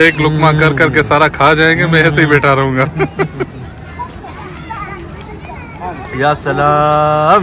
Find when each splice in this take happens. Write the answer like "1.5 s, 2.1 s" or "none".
none